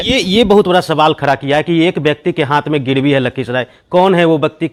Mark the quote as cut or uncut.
uncut